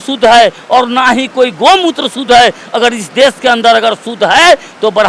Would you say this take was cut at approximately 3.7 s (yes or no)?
no